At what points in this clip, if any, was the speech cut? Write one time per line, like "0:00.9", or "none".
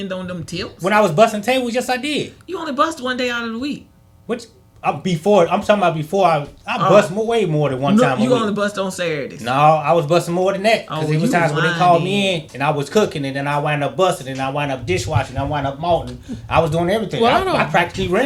none